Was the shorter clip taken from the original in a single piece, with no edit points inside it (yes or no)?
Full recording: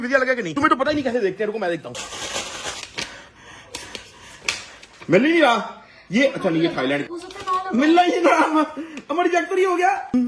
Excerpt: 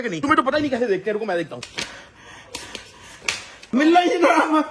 no